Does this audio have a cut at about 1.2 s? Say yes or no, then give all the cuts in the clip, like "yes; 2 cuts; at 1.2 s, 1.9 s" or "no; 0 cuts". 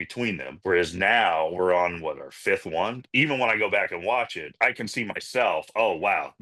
no; 2 cuts; at 3.0 s, 4.4 s